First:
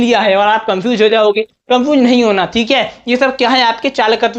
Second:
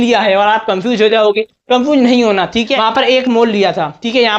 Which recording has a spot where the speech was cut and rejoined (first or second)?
second